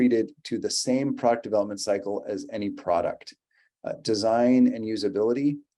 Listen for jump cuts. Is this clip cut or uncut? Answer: uncut